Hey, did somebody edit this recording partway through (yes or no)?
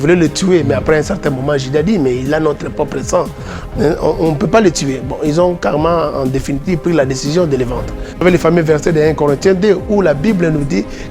yes